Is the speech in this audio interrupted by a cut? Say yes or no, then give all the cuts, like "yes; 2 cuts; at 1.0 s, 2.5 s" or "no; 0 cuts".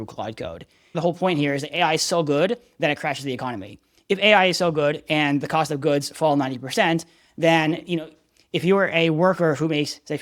yes; 1 cut; at 1.0 s